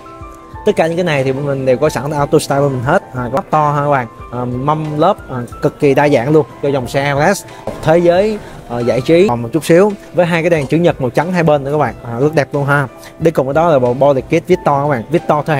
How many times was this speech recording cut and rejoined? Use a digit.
2